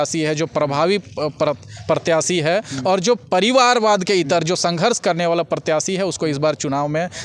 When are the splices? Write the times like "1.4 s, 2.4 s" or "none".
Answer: none